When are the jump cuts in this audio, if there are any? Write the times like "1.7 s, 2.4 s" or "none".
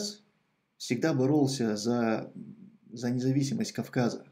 none